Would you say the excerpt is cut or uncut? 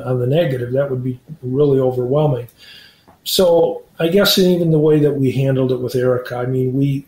cut